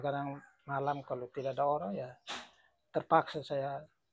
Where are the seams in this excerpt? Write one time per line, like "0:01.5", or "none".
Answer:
none